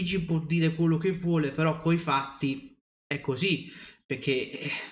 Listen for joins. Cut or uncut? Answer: uncut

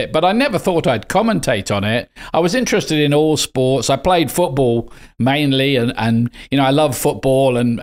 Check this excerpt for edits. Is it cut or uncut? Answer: uncut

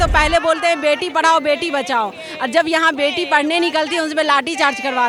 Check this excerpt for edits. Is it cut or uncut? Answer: uncut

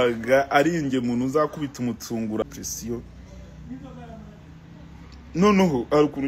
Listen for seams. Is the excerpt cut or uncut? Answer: cut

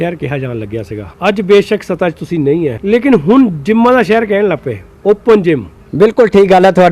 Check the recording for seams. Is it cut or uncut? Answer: cut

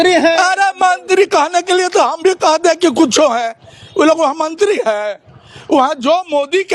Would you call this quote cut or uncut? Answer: uncut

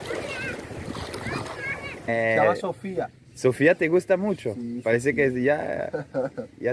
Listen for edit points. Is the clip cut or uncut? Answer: cut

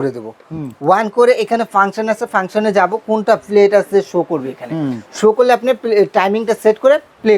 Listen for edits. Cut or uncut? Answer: uncut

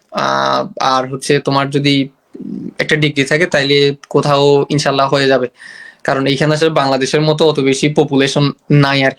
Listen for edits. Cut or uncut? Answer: uncut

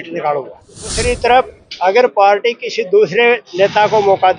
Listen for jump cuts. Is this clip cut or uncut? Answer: cut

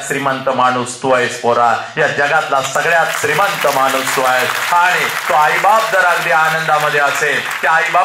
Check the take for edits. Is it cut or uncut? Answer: uncut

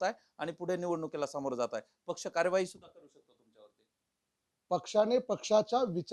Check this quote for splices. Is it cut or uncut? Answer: uncut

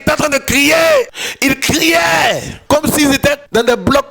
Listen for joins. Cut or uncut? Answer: cut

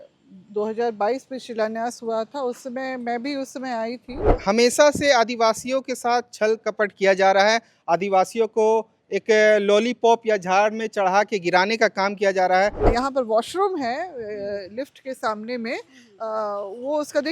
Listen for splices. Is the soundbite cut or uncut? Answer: cut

